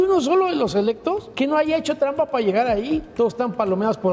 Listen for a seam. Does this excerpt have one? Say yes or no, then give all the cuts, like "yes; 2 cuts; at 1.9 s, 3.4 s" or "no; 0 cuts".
yes; 2 cuts; at 1.3 s, 3.1 s